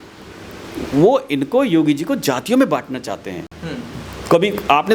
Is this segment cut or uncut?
uncut